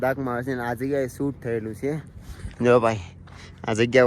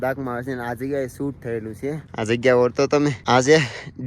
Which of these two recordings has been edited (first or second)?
second